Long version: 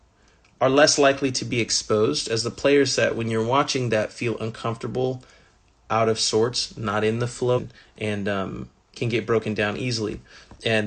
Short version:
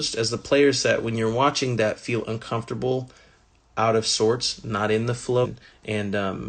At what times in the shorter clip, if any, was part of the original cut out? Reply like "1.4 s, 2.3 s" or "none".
none